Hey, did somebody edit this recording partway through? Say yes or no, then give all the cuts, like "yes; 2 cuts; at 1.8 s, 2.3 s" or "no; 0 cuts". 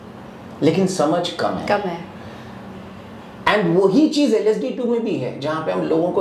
no; 0 cuts